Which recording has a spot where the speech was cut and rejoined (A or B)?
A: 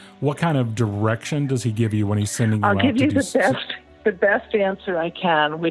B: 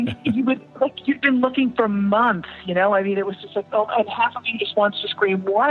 A